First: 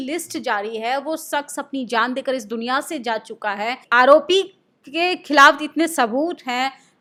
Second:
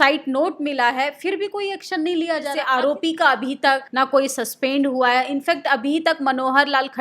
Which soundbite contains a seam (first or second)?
second